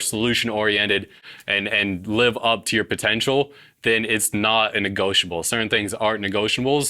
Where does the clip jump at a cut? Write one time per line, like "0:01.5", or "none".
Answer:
0:01.2